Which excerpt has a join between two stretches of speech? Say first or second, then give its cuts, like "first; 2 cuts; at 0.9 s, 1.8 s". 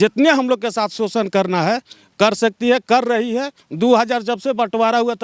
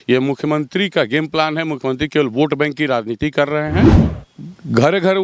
second; 1 cut; at 4.1 s